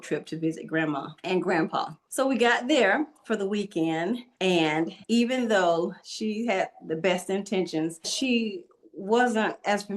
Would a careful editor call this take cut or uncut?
cut